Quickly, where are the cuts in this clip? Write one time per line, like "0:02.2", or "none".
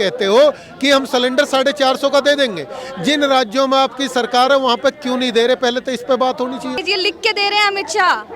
0:06.8